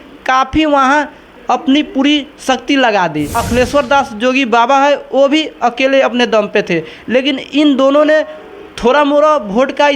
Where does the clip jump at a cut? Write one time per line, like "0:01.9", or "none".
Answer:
0:03.4